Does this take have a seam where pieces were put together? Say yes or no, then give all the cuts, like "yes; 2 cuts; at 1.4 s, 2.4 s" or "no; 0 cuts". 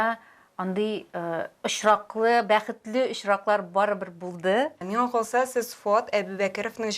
yes; 1 cut; at 4.8 s